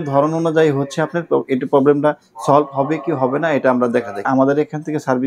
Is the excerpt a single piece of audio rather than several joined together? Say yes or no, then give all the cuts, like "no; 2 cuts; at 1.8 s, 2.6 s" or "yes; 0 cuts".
no; 1 cut; at 4.3 s